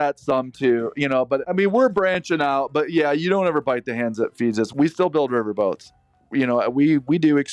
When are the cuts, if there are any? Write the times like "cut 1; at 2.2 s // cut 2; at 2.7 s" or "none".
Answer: cut 1; at 4.7 s // cut 2; at 6.2 s